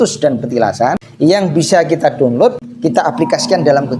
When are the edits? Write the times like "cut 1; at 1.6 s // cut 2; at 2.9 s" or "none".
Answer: cut 1; at 1.0 s // cut 2; at 2.7 s